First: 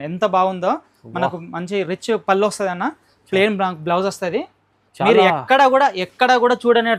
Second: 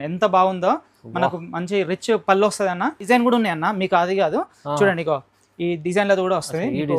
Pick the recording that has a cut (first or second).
second